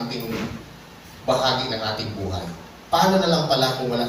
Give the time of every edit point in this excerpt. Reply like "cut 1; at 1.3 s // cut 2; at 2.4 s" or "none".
none

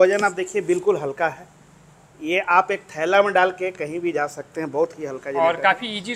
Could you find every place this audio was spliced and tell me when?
none

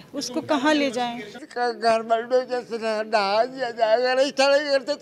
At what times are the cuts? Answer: cut 1; at 1.2 s

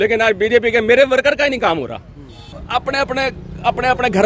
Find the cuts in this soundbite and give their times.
cut 1; at 2.5 s

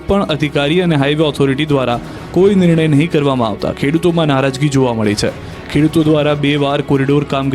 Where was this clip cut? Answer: cut 1; at 1.7 s

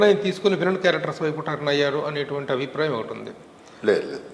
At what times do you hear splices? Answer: none

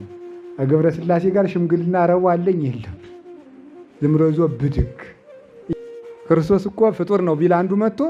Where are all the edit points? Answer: cut 1; at 5.7 s

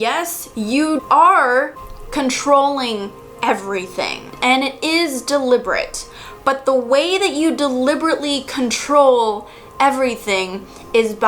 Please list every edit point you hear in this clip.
cut 1; at 1.0 s

